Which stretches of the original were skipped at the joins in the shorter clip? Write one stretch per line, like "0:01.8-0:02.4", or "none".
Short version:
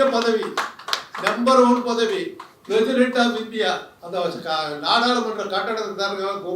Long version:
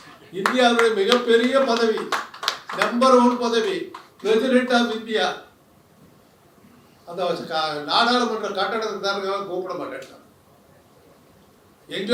0:05.5-0:07.0